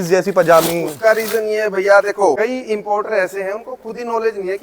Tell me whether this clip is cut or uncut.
cut